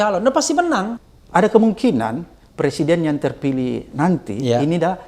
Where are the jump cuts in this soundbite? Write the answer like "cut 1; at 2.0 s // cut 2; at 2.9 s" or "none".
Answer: cut 1; at 1.0 s